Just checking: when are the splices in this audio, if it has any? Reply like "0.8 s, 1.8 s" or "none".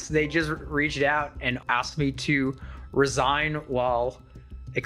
1.6 s

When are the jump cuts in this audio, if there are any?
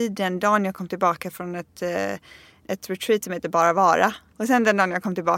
2.6 s, 4.3 s

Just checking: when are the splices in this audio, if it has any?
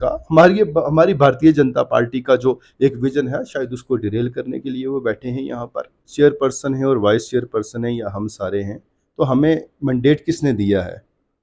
6.0 s

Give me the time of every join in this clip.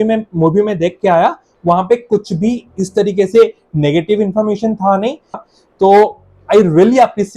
5.4 s

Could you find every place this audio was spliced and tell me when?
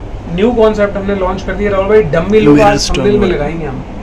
none

